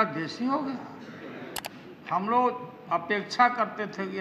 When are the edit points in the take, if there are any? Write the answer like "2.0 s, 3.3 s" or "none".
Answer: 1.6 s